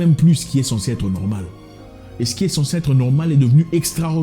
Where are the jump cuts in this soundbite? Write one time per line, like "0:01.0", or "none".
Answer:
none